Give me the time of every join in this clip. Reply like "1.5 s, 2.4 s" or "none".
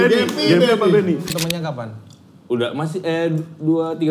1.3 s